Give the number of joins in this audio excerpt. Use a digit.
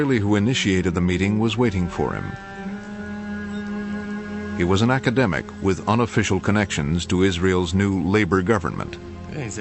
1